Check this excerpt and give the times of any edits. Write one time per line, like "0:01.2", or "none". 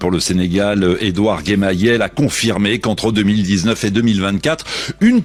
none